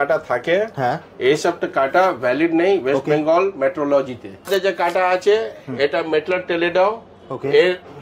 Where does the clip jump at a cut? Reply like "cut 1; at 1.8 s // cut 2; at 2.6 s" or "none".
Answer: cut 1; at 4.5 s